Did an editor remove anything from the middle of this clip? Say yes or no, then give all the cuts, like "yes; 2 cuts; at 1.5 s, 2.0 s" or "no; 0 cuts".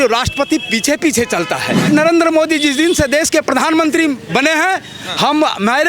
yes; 1 cut; at 1.9 s